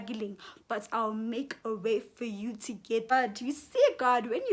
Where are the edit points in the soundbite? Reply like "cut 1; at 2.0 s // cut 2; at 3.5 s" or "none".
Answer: cut 1; at 3.1 s